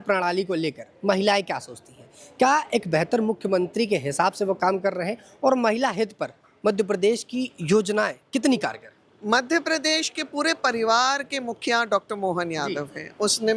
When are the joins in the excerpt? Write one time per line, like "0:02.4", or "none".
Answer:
none